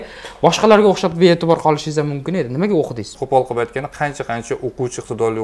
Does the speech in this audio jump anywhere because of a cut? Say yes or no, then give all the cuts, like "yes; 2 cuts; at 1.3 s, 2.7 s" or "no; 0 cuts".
yes; 1 cut; at 3.2 s